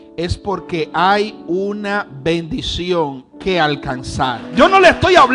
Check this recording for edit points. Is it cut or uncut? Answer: cut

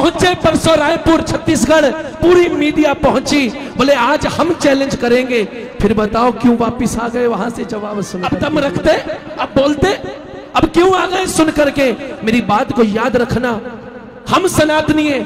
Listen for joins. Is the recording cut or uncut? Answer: cut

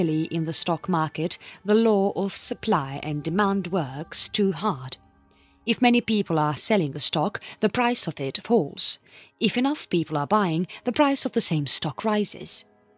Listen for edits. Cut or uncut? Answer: cut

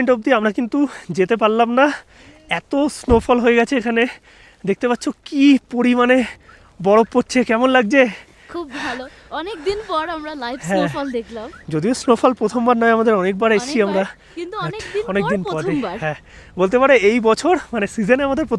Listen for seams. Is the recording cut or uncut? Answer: uncut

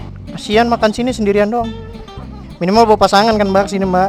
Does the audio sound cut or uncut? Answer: uncut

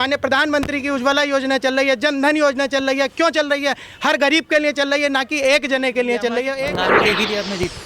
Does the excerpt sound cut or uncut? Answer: cut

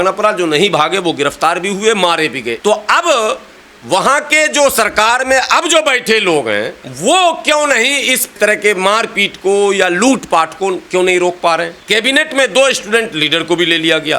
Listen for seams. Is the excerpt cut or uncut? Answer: cut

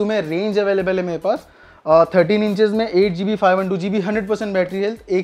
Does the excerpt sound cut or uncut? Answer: uncut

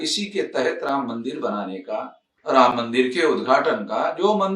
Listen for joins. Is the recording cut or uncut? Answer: cut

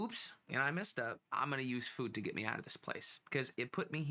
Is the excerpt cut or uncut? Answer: cut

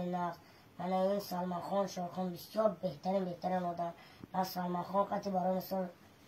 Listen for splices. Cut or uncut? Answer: uncut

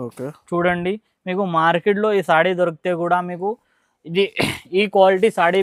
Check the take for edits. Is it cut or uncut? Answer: uncut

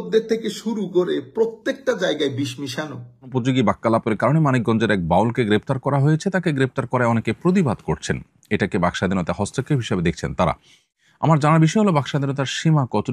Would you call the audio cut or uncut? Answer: cut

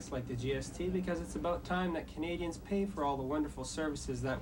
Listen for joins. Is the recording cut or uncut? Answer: uncut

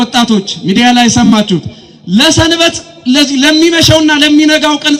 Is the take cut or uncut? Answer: uncut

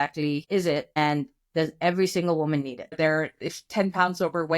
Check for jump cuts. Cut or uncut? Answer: cut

